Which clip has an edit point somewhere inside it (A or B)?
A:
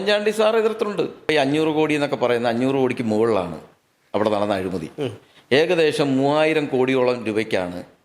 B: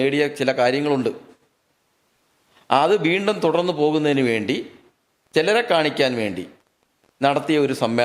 A